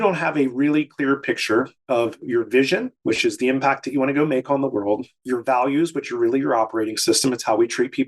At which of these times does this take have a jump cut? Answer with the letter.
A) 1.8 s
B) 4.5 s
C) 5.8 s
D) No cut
A